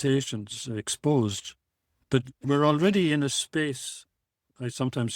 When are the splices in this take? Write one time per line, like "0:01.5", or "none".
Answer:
0:02.0